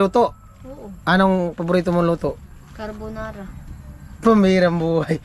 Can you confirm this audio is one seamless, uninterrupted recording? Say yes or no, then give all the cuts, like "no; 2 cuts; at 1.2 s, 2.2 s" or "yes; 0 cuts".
yes; 0 cuts